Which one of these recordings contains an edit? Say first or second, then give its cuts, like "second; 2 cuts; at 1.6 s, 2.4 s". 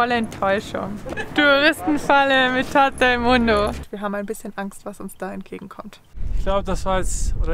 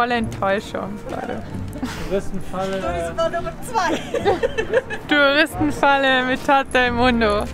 first; 3 cuts; at 1.2 s, 3.9 s, 6.3 s